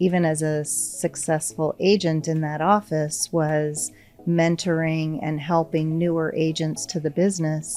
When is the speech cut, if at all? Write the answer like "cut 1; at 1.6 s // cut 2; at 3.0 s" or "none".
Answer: none